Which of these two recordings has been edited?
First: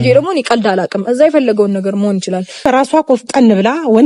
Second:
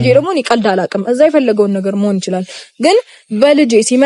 first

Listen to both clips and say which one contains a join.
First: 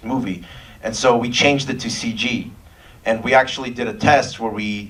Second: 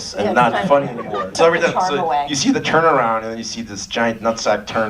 second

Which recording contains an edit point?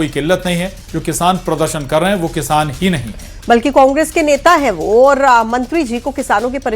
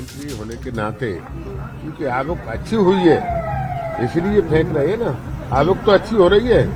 first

